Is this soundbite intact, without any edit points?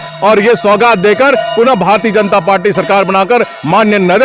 yes; 0 cuts

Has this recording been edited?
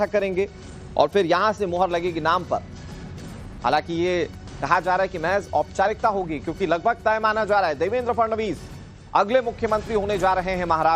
yes; 1 cut; at 7.0 s

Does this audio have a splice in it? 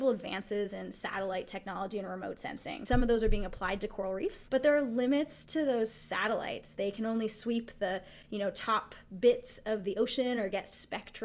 yes; 2 cuts; at 2.8 s, 4.4 s

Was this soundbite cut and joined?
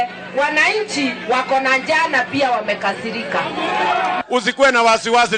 yes; 1 cut; at 4.2 s

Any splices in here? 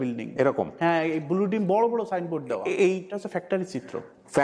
yes; 1 cut; at 3.1 s

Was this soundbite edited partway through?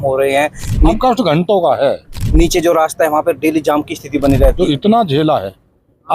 yes; 3 cuts; at 0.9 s, 2.2 s, 4.5 s

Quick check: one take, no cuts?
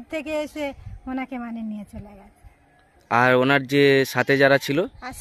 yes; 0 cuts

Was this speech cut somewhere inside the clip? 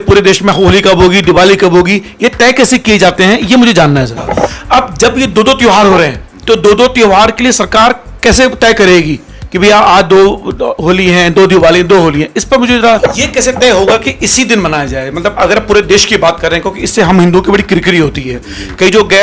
yes; 2 cuts; at 4.2 s, 13.0 s

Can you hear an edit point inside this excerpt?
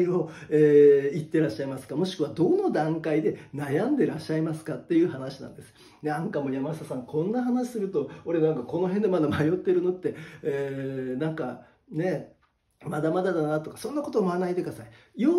no; 0 cuts

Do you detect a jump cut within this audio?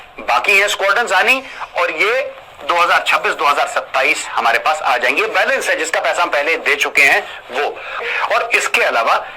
yes; 1 cut; at 8.0 s

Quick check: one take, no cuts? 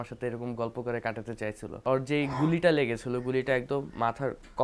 no; 1 cut; at 1.8 s

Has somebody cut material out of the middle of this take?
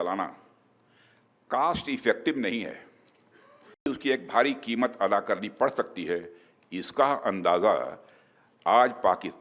yes; 1 cut; at 3.9 s

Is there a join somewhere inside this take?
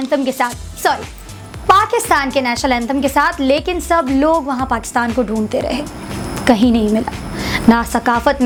no; 0 cuts

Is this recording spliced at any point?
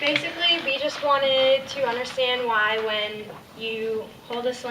yes; 1 cut; at 1.3 s

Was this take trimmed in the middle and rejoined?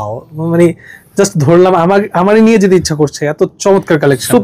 no; 0 cuts

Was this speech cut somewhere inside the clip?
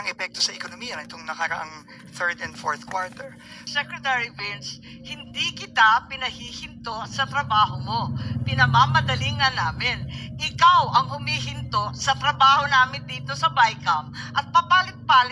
yes; 1 cut; at 3.6 s

